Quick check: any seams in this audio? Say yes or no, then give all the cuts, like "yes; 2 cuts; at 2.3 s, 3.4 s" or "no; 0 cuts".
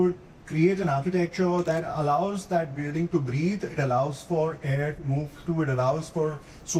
no; 0 cuts